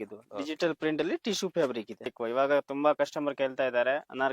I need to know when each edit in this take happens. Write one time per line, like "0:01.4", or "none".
0:02.1